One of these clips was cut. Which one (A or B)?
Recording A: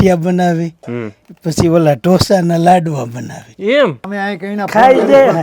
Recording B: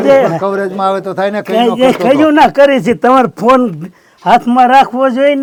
A